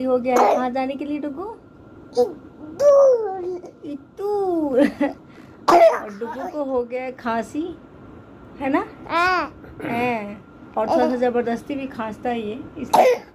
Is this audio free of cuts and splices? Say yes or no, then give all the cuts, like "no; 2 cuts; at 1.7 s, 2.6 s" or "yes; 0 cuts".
yes; 0 cuts